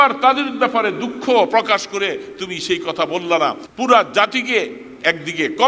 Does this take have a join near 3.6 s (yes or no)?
yes